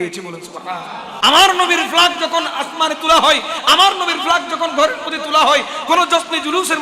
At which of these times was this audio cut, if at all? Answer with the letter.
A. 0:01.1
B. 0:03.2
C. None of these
A